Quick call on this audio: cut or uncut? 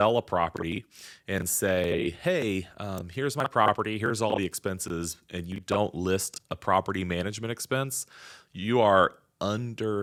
uncut